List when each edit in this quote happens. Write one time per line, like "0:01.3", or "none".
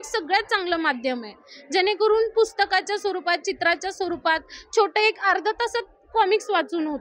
none